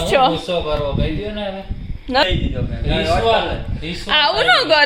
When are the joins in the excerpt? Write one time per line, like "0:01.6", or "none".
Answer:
0:02.2